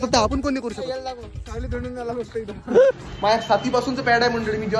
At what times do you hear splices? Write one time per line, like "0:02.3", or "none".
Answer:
0:03.1